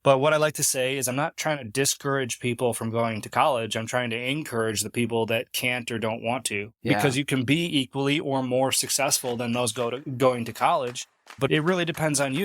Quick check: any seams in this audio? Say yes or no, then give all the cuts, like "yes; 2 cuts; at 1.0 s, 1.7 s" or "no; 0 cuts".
yes; 1 cut; at 11.5 s